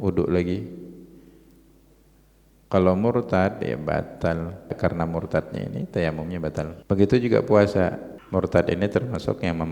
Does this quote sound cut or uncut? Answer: cut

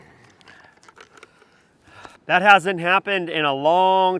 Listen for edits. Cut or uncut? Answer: cut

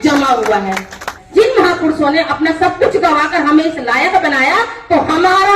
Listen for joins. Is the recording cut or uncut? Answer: cut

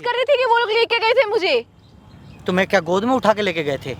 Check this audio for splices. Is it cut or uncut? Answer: uncut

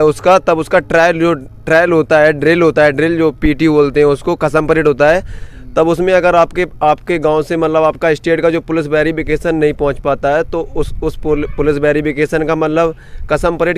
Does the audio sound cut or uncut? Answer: uncut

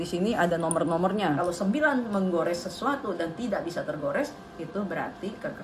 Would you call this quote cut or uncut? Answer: cut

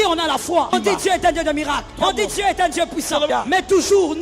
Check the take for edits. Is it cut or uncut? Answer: cut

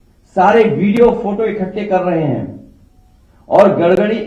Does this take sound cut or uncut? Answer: uncut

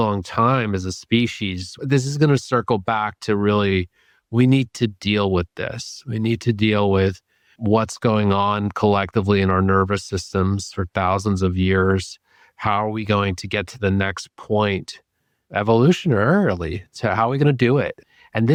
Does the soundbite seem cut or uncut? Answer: uncut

